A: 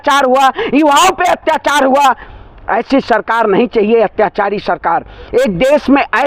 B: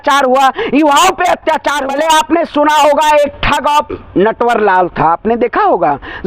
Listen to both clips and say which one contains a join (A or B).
B